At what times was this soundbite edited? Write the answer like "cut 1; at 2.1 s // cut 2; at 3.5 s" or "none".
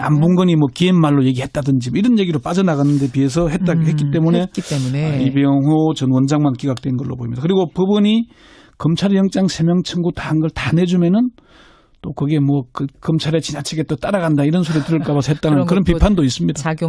cut 1; at 5.1 s